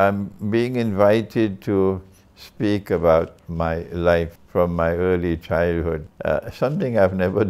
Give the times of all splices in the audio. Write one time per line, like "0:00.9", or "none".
0:04.4
0:06.1